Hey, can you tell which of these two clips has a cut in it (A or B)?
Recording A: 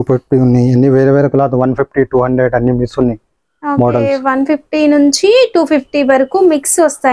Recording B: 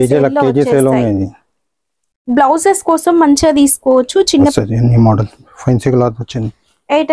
B